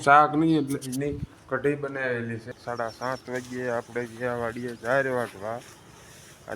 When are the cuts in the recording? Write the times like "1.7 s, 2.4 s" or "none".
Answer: 2.4 s